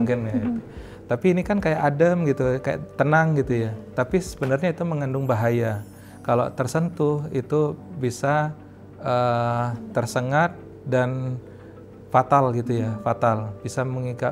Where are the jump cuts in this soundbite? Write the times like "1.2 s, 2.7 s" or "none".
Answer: none